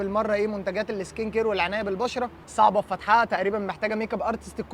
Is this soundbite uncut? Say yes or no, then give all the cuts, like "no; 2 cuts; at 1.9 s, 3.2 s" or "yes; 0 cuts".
yes; 0 cuts